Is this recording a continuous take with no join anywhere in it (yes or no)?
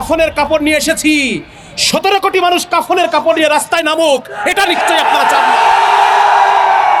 yes